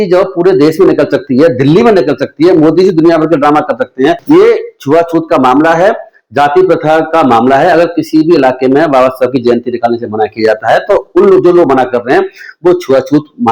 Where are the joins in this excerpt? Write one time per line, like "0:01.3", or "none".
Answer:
0:04.2

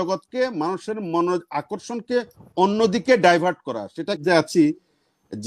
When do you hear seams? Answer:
0:04.2

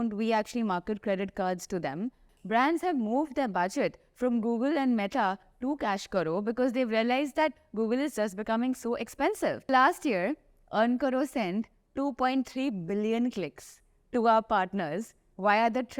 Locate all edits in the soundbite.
0:02.3
0:09.7

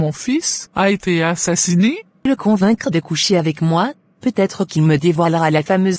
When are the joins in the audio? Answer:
0:02.2

